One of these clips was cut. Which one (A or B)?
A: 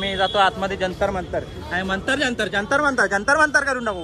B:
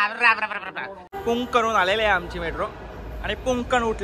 B